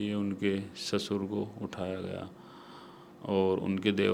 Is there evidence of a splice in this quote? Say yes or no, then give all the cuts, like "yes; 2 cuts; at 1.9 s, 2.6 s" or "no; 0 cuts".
no; 0 cuts